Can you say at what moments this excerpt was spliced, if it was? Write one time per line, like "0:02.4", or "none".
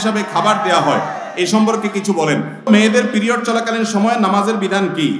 0:02.7